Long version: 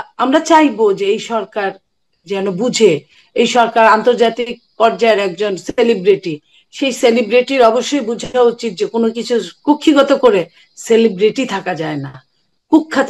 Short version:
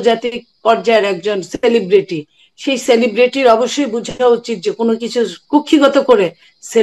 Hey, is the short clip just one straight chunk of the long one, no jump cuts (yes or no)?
yes